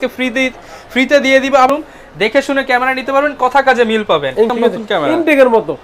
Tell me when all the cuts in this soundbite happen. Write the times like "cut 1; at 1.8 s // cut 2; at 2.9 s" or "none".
cut 1; at 1.7 s // cut 2; at 4.5 s